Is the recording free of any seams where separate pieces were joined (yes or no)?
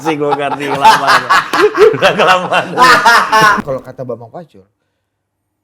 no